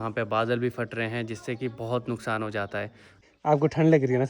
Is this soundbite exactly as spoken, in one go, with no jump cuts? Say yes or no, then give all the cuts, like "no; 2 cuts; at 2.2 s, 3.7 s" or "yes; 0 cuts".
no; 1 cut; at 3.0 s